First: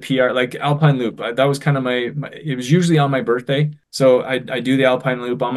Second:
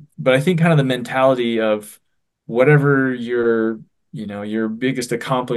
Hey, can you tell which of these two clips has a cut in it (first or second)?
first